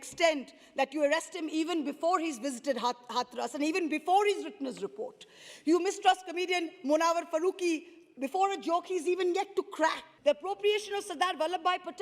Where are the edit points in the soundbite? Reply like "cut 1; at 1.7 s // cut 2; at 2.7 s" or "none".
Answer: cut 1; at 10.1 s